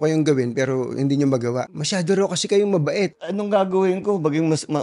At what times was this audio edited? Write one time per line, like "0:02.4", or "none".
0:01.7
0:03.2

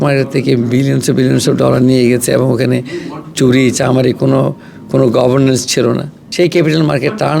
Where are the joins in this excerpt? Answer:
0:06.2

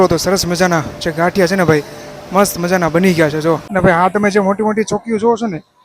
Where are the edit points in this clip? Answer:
0:03.7

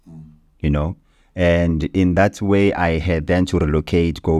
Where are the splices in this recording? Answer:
none

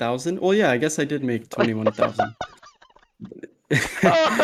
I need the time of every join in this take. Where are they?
none

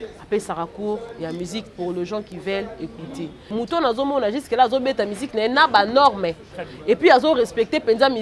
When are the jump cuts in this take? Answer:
0:03.5

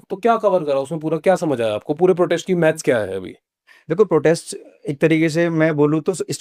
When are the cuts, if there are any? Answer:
none

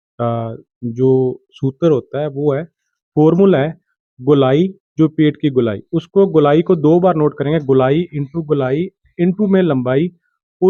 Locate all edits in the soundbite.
none

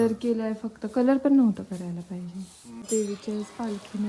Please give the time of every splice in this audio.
0:02.8

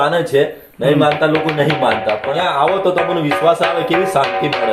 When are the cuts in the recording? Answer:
0:02.3

